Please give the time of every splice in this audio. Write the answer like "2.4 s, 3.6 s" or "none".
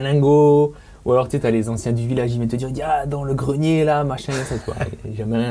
none